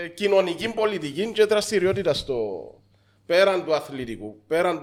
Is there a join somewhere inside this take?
no; 0 cuts

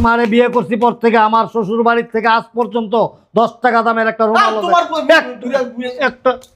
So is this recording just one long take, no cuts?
yes; 0 cuts

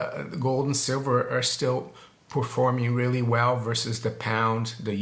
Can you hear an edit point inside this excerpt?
no; 0 cuts

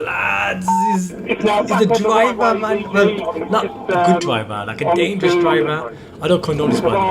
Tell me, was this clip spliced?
no; 0 cuts

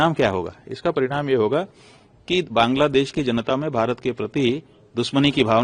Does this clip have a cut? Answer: no; 0 cuts

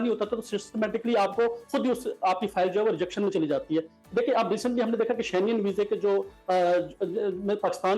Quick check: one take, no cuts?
yes; 0 cuts

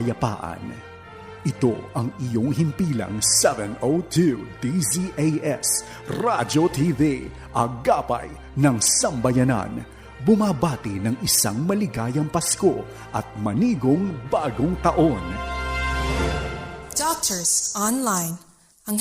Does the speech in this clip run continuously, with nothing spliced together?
no; 1 cut; at 16.8 s

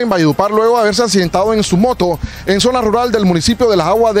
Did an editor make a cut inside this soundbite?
no; 0 cuts

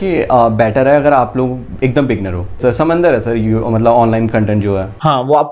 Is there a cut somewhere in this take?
yes; 1 cut; at 2.6 s

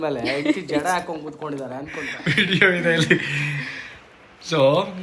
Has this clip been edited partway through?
yes; 1 cut; at 2.1 s

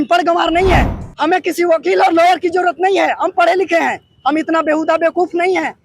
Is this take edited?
yes; 1 cut; at 1.0 s

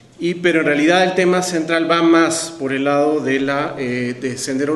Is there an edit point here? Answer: no; 0 cuts

